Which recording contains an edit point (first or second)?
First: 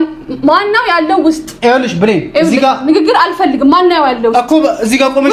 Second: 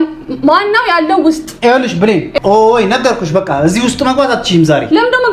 second